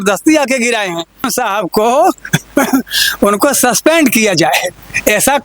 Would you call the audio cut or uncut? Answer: cut